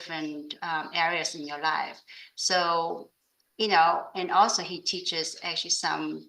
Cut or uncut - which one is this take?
uncut